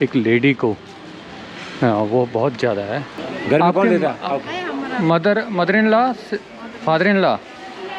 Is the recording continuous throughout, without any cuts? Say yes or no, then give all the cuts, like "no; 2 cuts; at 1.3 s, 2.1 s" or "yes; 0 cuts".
no; 1 cut; at 3.2 s